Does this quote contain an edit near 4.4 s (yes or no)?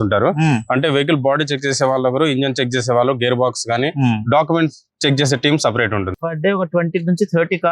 no